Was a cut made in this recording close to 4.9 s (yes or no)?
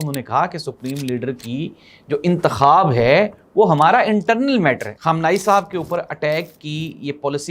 yes